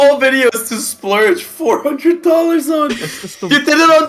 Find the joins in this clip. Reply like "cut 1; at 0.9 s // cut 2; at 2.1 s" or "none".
none

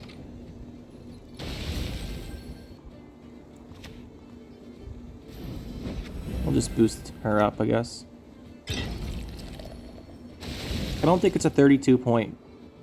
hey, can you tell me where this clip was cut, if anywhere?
cut 1; at 2.8 s

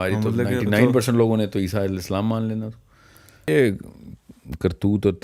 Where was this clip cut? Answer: cut 1; at 3.5 s

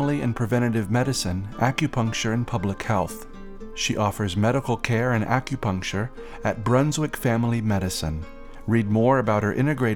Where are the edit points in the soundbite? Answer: none

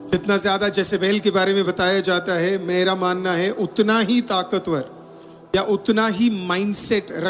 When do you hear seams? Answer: none

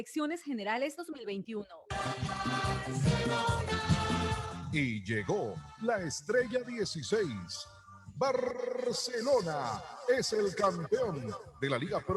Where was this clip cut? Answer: cut 1; at 1.6 s

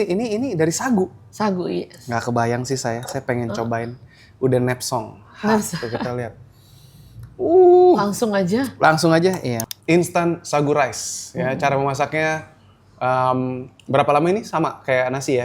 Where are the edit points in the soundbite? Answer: cut 1; at 9.6 s

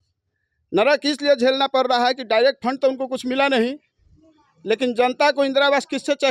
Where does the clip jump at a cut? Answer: none

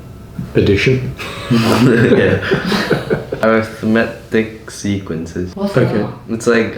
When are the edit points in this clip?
cut 1; at 3.4 s // cut 2; at 5.5 s

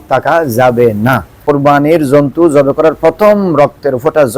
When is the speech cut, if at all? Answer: cut 1; at 1.3 s

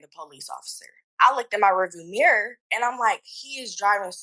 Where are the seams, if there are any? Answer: cut 1; at 1.1 s

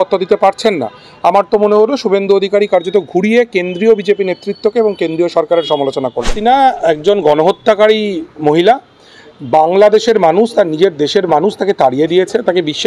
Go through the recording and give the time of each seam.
cut 1; at 6.3 s

